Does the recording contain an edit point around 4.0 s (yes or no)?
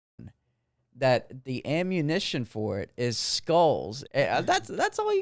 yes